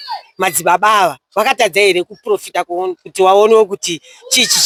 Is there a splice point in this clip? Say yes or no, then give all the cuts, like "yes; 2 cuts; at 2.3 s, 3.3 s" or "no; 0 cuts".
no; 0 cuts